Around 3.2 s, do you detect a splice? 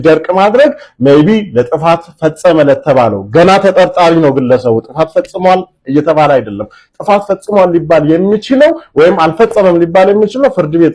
no; 0 cuts

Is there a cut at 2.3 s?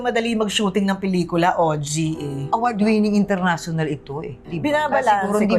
yes; 1 cut; at 2.3 s

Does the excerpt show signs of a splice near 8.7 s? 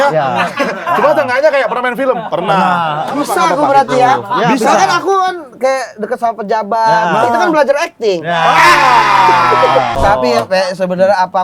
no; 2 cuts; at 3.2 s, 9.9 s

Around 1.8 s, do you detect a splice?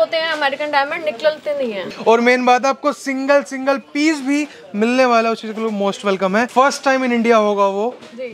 yes; 2 cuts; at 1.8 s, 6.5 s

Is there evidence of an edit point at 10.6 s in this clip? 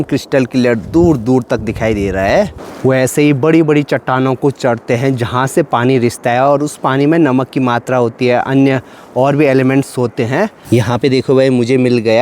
yes; 2 cuts; at 2.7 s, 10.6 s

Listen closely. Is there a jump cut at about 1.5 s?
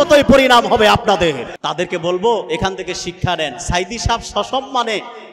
yes; 1 cut; at 1.5 s

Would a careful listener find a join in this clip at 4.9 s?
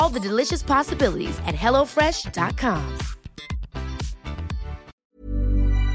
yes; 1 cut; at 4.9 s

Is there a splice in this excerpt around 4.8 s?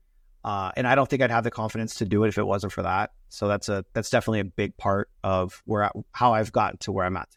no; 0 cuts

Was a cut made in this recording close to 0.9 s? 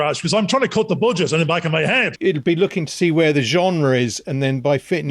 no; 1 cut; at 2.2 s

